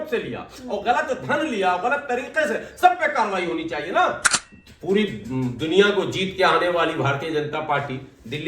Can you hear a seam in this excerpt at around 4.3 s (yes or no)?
yes